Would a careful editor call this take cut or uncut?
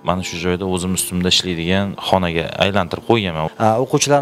cut